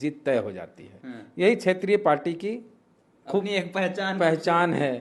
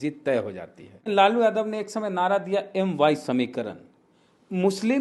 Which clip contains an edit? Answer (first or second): second